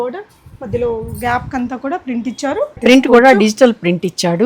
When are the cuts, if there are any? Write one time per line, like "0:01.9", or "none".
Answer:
0:02.7